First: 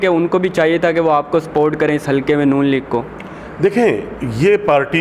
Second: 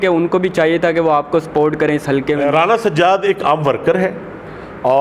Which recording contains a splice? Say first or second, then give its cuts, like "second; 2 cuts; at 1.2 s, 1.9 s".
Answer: second; 1 cut; at 2.4 s